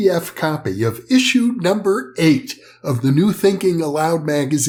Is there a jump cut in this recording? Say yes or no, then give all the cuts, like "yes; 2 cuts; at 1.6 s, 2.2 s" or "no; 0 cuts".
no; 0 cuts